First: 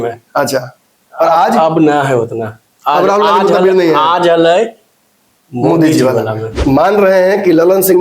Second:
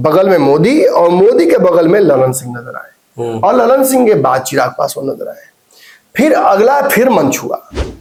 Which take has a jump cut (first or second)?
first